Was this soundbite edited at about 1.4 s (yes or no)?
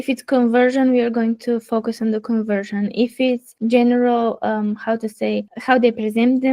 no